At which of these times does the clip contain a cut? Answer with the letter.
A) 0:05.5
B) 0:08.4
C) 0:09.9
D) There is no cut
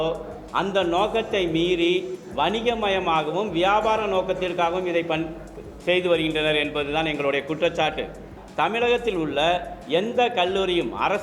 B